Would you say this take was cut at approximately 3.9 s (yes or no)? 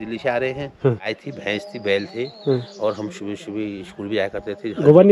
no